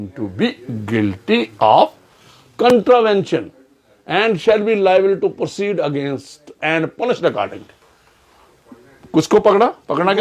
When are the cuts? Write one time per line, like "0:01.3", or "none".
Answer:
none